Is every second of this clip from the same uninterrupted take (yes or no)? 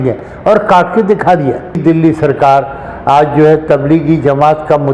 no